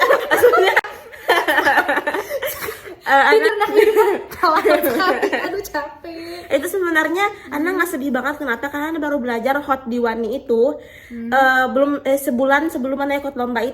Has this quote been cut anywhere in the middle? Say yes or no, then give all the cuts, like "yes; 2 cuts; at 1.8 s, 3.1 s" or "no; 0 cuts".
no; 0 cuts